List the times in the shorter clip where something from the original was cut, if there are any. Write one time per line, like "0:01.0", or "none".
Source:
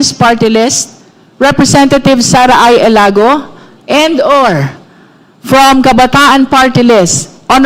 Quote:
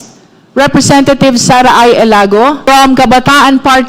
0:02.6